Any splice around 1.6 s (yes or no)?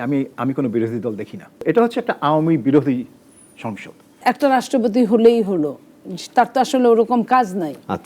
yes